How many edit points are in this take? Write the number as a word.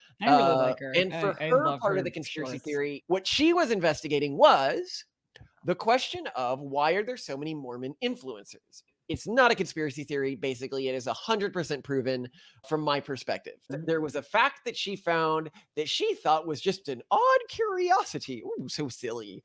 three